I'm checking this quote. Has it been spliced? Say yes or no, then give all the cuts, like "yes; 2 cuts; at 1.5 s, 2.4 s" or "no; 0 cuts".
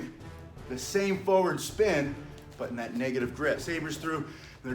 yes; 1 cut; at 3.6 s